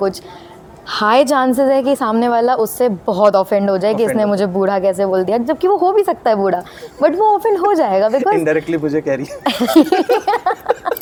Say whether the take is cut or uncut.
uncut